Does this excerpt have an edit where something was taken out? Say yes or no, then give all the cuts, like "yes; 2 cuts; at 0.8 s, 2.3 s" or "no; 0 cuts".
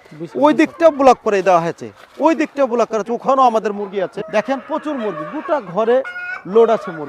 yes; 1 cut; at 4.2 s